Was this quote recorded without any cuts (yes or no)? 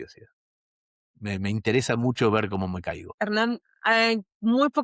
no